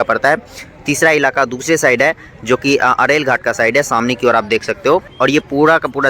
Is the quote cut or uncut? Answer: uncut